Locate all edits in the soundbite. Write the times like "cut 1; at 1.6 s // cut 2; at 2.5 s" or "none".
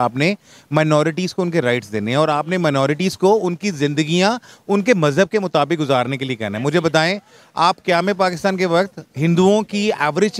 none